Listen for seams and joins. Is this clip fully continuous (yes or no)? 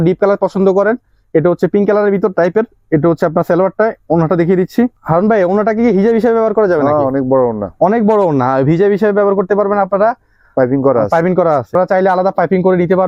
yes